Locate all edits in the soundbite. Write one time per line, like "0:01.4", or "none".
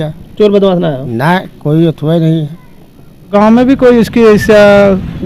0:03.3